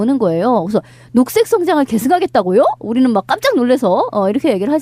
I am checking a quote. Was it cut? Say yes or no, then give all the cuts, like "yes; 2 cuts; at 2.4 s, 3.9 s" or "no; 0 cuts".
yes; 1 cut; at 1.2 s